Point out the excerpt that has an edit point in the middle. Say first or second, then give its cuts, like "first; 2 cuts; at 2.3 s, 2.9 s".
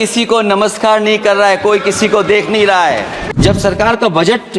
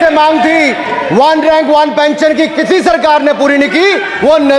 first; 1 cut; at 3.2 s